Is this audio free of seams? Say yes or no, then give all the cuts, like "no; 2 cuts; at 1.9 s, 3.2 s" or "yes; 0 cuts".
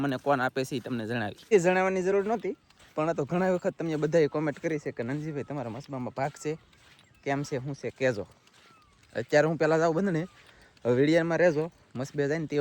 yes; 0 cuts